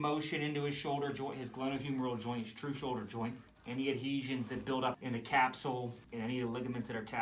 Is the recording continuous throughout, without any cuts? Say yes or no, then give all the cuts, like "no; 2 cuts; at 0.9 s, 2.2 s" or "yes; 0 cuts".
no; 3 cuts; at 3.5 s, 5.0 s, 6.0 s